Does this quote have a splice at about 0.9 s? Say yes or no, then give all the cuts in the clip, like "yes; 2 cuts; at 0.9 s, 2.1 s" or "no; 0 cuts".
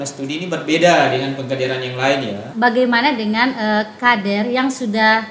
no; 1 cut; at 2.4 s